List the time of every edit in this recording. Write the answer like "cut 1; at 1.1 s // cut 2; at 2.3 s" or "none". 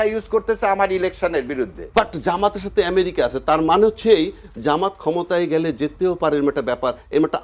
cut 1; at 1.8 s